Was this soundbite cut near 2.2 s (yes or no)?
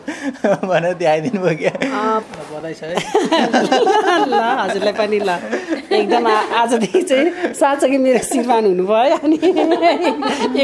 yes